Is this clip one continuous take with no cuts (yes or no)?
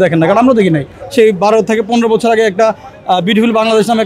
no